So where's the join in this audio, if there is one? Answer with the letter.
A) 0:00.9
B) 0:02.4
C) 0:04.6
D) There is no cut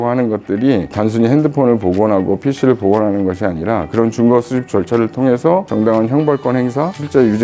A